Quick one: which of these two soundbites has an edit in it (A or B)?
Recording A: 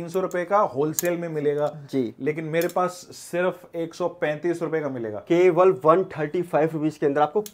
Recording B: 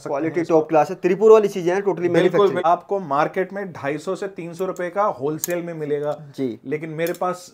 B